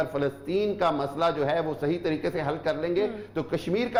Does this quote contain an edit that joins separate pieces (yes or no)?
no